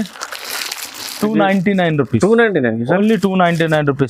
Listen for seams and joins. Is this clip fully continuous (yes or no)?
yes